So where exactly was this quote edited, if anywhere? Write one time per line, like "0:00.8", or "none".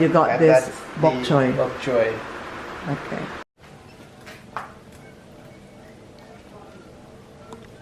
0:03.5